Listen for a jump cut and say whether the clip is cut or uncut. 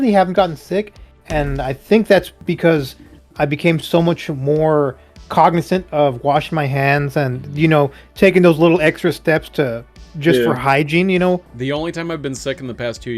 cut